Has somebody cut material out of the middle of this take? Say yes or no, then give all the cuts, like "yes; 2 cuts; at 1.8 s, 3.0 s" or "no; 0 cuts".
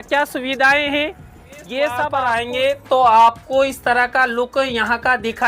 yes; 1 cut; at 2.1 s